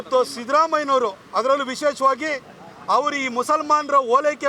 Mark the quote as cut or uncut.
uncut